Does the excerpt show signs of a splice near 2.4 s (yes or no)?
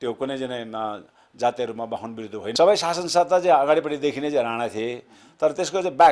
yes